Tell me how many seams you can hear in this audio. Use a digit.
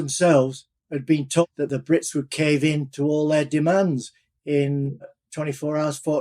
2